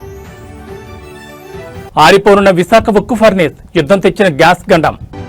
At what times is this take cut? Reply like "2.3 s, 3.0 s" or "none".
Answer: 1.1 s